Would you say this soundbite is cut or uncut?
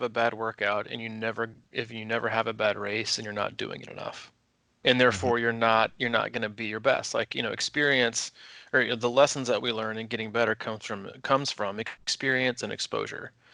uncut